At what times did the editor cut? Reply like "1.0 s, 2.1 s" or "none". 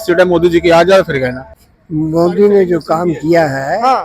1.4 s